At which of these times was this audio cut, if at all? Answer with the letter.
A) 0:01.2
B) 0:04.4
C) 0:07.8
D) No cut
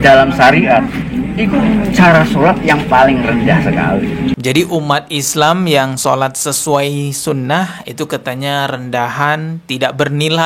B